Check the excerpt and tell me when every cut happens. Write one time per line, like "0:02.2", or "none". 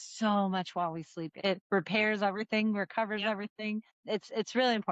0:01.3
0:03.9